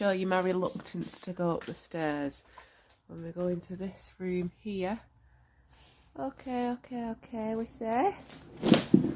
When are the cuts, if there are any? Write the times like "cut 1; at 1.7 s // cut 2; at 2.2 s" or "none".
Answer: none